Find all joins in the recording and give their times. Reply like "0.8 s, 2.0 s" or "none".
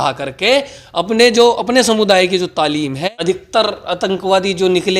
3.0 s